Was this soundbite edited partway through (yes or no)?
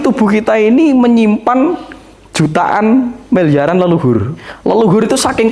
yes